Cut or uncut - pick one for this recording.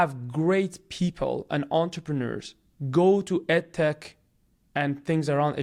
uncut